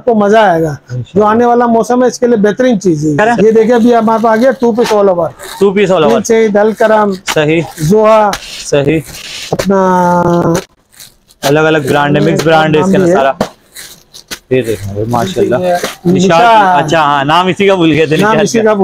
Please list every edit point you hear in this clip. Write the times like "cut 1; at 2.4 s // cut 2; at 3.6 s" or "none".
none